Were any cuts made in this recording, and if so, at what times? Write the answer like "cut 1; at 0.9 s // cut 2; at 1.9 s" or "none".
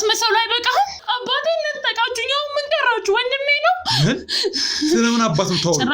cut 1; at 1.0 s